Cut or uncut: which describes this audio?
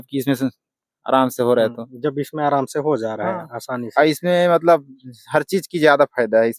uncut